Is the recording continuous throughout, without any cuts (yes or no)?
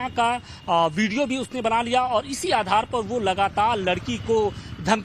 no